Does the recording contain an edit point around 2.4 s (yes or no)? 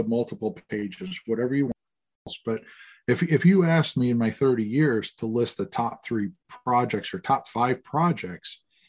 yes